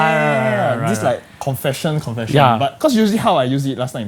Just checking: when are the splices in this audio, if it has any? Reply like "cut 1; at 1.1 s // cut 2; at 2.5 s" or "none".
cut 1; at 2.7 s